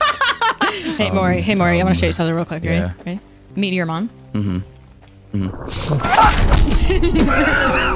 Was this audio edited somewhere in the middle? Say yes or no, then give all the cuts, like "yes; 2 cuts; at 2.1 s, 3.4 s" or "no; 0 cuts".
yes; 2 cuts; at 0.9 s, 3.5 s